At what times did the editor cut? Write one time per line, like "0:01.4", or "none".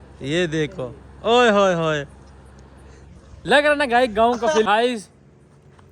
0:04.6